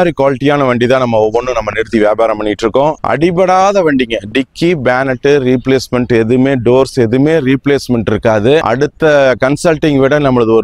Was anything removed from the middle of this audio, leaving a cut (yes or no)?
yes